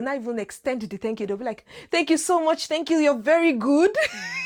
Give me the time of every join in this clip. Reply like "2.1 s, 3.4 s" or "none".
none